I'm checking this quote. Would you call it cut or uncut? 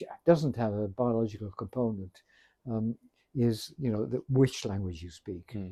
uncut